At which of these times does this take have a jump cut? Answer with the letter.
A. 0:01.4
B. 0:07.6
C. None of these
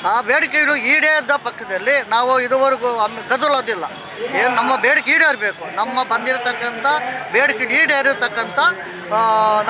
C